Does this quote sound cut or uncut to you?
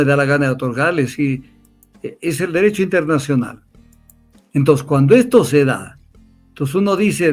uncut